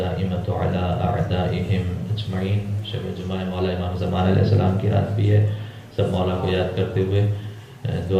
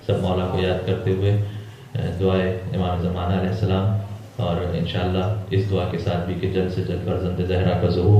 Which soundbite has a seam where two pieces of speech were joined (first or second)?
second